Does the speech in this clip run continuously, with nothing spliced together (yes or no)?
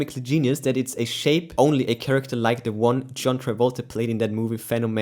yes